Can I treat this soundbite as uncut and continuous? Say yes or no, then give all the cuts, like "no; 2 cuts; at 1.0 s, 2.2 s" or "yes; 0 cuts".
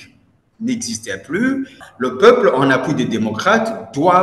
no; 1 cut; at 1.8 s